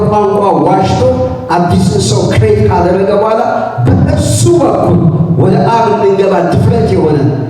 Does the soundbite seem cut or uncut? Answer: uncut